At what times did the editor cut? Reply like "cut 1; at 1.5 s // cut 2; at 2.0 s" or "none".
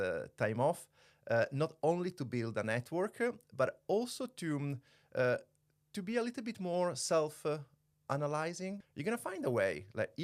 cut 1; at 8.8 s